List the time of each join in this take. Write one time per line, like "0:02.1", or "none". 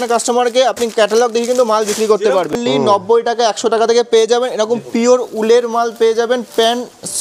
0:02.5